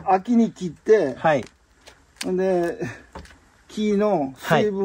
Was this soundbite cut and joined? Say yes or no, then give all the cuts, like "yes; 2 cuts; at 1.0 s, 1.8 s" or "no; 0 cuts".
no; 0 cuts